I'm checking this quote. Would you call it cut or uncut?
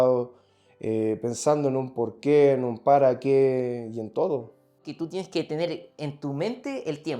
cut